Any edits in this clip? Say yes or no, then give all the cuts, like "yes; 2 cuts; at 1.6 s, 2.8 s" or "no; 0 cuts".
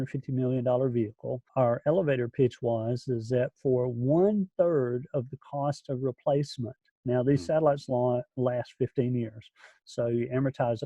yes; 1 cut; at 1.5 s